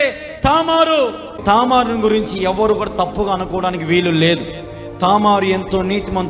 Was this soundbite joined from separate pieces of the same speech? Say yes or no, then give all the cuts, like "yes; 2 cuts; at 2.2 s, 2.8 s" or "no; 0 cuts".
yes; 1 cut; at 1.4 s